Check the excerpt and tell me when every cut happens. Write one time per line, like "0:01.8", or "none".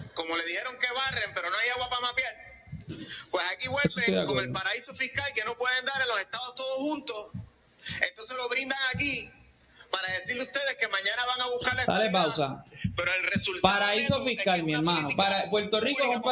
none